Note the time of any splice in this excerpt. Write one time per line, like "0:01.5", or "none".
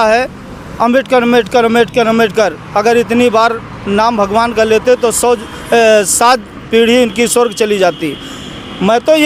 none